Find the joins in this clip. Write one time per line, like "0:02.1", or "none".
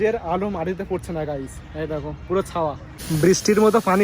0:02.9